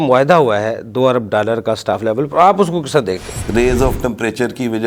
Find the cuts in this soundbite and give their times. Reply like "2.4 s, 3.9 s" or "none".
3.4 s